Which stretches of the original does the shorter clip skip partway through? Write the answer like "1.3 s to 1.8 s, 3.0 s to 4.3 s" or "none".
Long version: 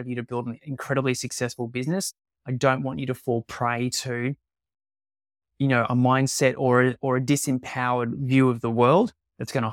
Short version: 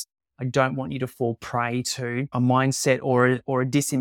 4.4 s to 5.9 s

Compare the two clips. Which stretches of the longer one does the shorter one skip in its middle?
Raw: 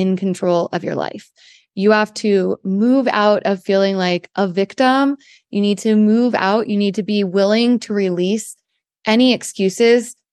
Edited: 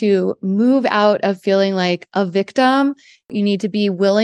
5.5 s to 6.6 s

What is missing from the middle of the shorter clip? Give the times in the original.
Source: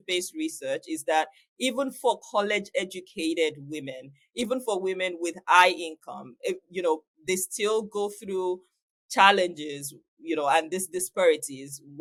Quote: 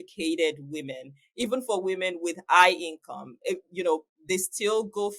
none

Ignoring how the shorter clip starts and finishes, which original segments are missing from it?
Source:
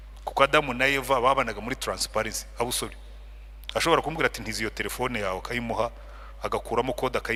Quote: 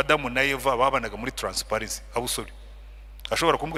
none

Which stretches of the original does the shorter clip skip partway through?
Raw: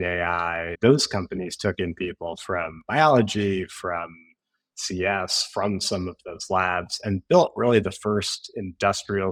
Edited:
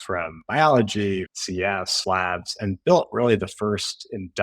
4.3 s to 6.3 s

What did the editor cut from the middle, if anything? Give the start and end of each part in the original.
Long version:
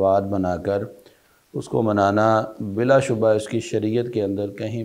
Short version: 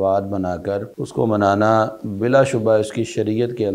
1.0 s to 1.5 s

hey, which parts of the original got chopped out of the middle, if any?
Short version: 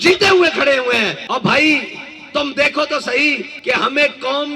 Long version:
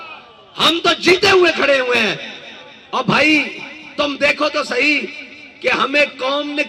2.2 s to 2.8 s, 5.1 s to 5.5 s

